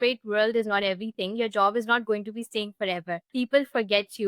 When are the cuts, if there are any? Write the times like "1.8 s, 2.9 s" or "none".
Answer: 3.2 s